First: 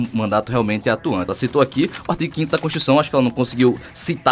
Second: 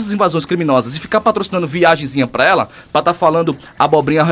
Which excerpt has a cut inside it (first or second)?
first